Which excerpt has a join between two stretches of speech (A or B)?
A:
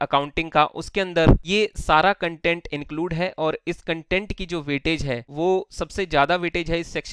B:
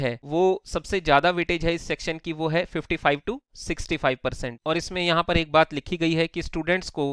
B